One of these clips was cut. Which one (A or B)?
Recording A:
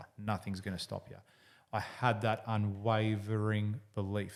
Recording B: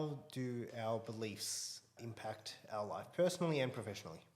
B